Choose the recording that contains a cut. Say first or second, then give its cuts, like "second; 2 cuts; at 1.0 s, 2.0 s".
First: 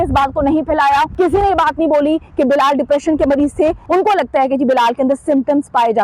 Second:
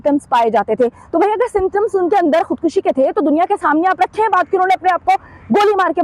first; 2 cuts; at 1.1 s, 3.8 s